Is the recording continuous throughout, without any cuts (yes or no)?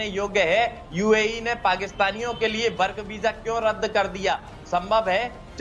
yes